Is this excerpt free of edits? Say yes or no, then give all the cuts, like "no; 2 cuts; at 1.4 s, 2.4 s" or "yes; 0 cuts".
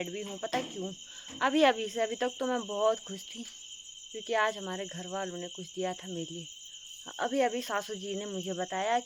yes; 0 cuts